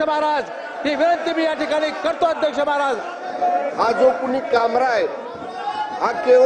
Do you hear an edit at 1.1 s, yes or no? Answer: no